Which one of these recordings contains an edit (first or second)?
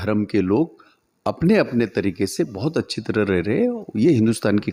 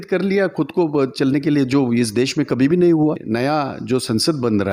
second